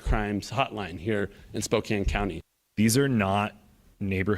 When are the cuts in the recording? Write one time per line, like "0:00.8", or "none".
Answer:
0:02.5

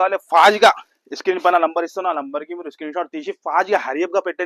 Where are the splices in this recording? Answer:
none

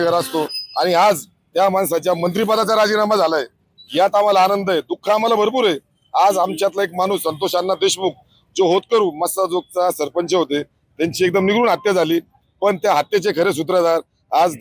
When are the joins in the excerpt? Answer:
none

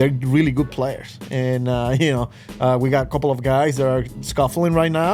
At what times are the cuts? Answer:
none

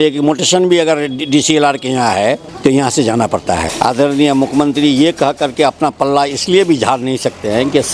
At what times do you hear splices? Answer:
0:02.5
0:03.7

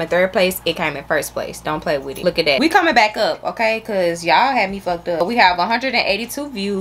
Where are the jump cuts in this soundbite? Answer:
none

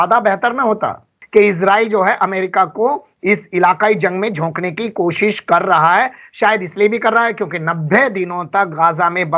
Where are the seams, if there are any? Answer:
0:01.2

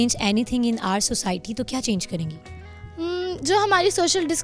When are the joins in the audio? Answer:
none

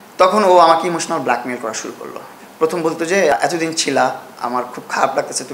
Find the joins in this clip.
0:02.3
0:03.3

